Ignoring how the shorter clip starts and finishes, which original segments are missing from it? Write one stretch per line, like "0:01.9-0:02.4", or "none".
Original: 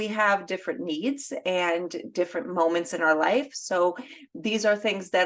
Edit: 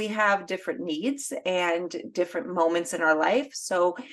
none